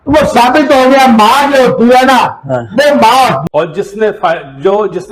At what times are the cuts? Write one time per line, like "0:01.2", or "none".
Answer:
0:03.4